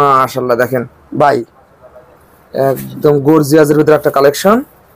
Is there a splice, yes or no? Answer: no